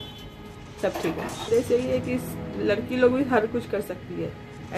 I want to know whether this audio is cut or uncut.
cut